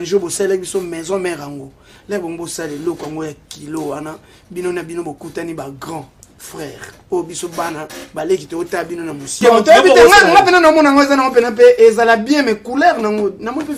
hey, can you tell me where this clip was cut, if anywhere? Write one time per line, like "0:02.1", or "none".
0:09.3

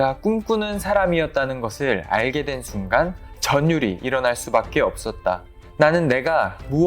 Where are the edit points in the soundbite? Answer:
0:05.6

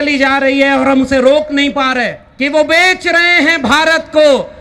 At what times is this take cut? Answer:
0:02.2

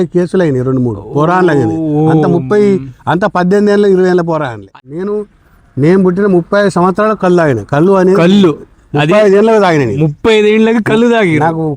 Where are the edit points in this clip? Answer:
0:04.7

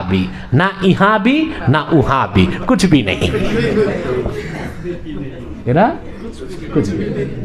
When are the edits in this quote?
none

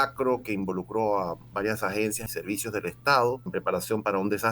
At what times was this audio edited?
0:02.2
0:03.4

